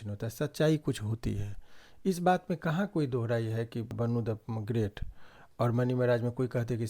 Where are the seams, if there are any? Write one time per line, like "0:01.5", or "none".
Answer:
0:03.9